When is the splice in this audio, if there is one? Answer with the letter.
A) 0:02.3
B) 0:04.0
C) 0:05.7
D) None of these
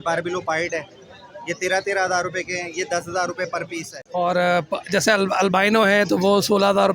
B